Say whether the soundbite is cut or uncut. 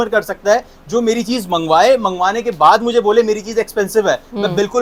uncut